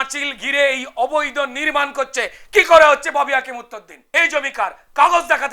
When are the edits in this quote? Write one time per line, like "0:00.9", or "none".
0:03.9